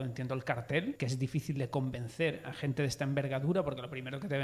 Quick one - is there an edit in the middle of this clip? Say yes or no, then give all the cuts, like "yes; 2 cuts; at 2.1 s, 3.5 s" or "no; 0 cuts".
yes; 1 cut; at 1.0 s